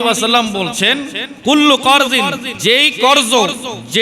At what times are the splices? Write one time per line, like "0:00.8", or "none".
0:01.2
0:02.5

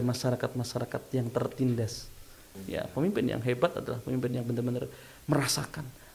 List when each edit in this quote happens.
0:02.5

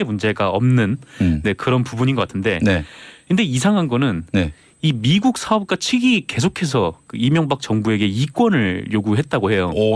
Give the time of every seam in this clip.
none

